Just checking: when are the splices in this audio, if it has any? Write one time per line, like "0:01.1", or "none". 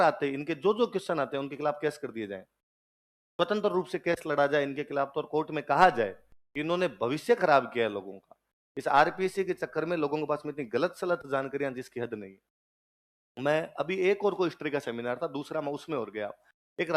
none